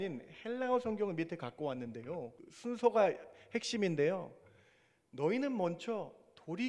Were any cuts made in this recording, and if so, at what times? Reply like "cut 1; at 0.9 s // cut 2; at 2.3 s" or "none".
cut 1; at 2.5 s